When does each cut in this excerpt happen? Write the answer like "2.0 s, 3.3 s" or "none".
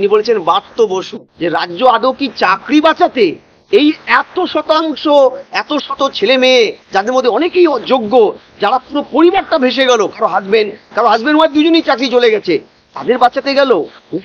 1.2 s